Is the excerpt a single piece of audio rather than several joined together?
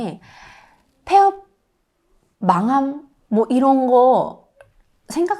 yes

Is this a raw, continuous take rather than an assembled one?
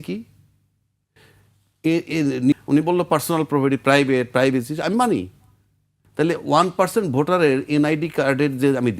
no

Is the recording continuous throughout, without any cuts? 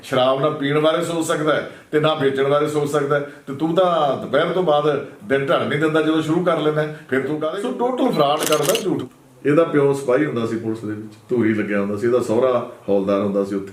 no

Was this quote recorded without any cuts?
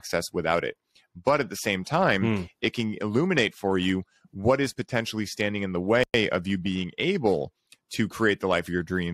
yes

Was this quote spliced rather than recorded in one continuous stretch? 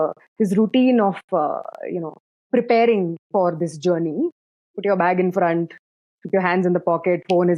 no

